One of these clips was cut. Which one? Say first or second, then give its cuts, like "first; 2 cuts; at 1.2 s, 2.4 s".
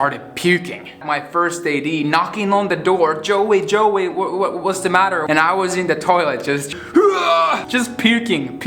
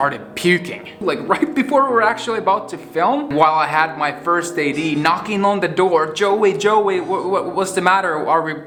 first; 3 cuts; at 1.0 s, 5.2 s, 7.6 s